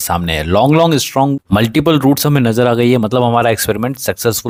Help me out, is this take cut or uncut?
uncut